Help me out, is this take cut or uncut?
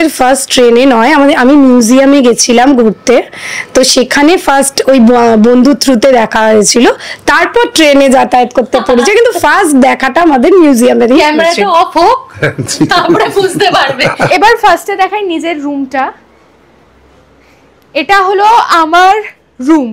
cut